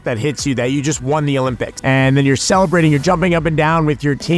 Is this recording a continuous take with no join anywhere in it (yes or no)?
no